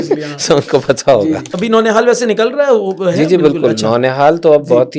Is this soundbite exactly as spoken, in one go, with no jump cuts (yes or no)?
no